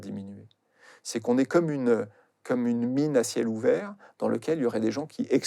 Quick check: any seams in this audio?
no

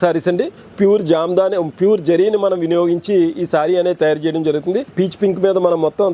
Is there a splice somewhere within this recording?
yes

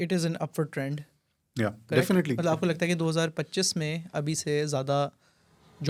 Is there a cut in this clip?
no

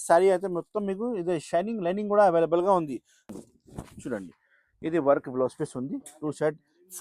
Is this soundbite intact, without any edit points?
no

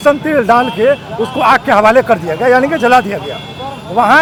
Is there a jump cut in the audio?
no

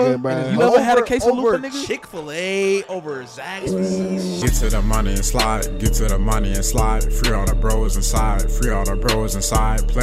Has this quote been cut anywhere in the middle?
yes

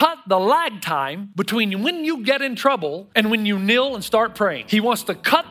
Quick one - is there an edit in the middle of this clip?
yes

